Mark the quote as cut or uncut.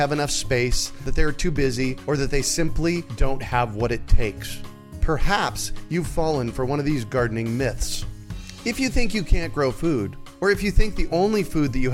uncut